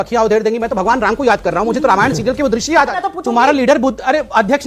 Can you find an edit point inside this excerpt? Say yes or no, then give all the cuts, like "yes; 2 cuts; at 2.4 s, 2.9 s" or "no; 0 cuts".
yes; 1 cut; at 3.0 s